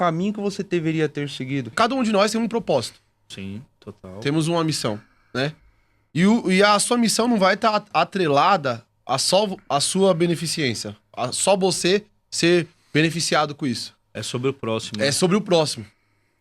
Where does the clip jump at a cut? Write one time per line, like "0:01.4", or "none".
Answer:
0:01.7

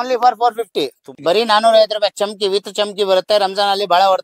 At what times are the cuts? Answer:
0:01.1

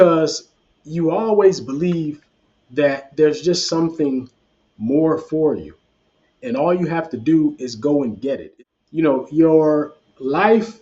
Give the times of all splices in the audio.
0:08.5

